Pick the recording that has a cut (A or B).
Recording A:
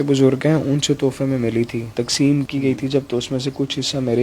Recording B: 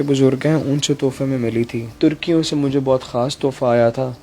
B